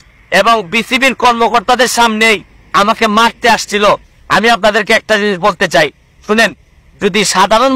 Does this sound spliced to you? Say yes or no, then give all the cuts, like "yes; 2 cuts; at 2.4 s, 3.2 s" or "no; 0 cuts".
yes; 1 cut; at 4.1 s